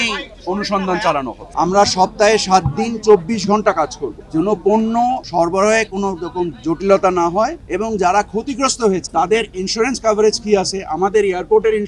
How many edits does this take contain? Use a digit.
4